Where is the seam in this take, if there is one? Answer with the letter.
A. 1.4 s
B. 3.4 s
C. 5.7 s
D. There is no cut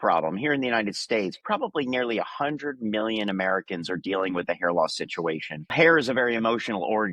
C